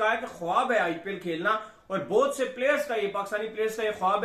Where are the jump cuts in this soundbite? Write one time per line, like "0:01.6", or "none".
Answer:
none